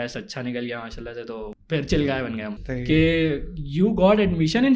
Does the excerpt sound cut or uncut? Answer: cut